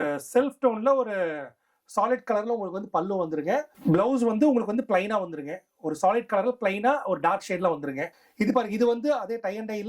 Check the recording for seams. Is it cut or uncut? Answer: cut